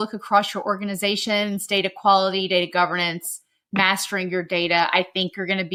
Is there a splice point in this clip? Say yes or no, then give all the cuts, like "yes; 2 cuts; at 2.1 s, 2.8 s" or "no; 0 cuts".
no; 0 cuts